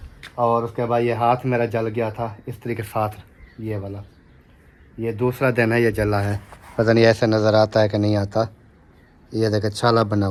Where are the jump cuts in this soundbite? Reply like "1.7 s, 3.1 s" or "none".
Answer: none